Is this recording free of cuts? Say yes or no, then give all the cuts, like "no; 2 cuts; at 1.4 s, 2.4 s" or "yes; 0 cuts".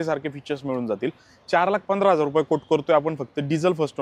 yes; 0 cuts